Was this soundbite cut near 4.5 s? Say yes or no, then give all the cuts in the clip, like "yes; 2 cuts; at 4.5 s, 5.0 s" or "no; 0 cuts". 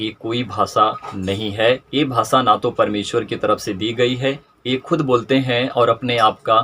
yes; 1 cut; at 4.5 s